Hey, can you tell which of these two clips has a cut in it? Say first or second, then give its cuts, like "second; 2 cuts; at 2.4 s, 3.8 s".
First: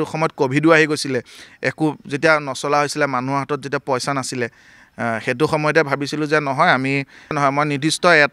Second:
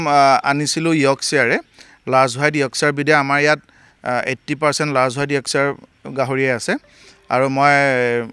first; 1 cut; at 7.4 s